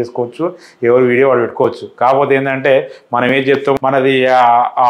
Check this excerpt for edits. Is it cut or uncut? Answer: cut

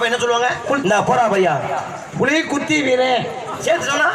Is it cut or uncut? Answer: uncut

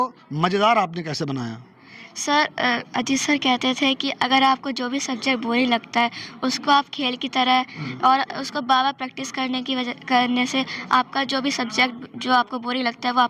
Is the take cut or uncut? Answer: uncut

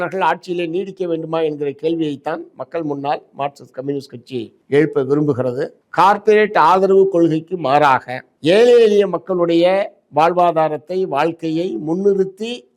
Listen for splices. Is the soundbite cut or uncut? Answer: uncut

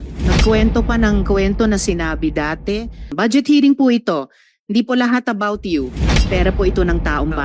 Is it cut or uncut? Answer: cut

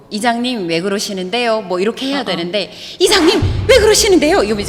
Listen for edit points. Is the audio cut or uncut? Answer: uncut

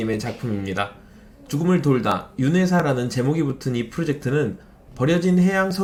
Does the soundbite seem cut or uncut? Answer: uncut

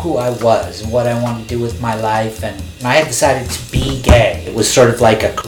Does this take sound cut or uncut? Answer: cut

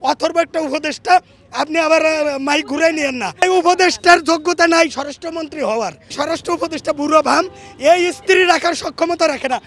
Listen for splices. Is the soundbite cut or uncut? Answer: cut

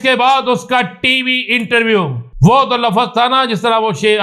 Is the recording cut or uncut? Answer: cut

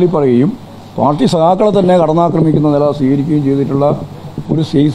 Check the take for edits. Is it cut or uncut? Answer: uncut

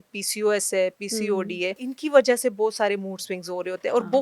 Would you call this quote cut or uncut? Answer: cut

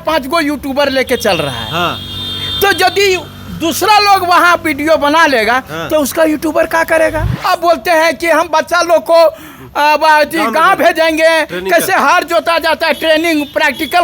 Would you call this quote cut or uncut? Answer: cut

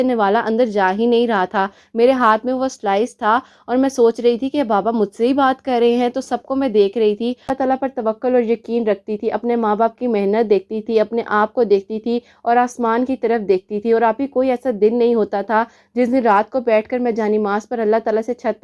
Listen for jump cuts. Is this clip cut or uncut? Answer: cut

